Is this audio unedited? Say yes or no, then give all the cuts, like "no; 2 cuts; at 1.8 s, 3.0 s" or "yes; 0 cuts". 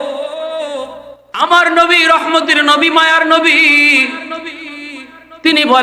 no; 1 cut; at 1.4 s